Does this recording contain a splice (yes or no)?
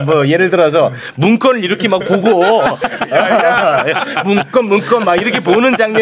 no